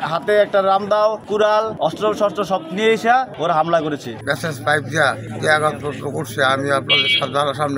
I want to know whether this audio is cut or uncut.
cut